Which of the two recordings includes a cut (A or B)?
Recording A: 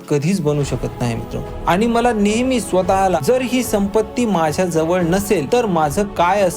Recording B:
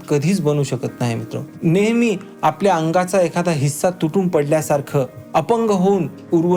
A